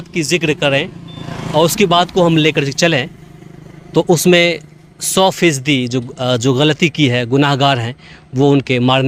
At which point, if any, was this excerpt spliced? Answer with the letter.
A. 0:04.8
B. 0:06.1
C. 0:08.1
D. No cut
D